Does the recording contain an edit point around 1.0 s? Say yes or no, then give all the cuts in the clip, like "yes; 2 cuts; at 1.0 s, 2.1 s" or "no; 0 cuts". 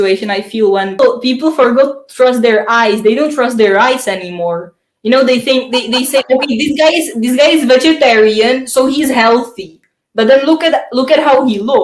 yes; 1 cut; at 1.0 s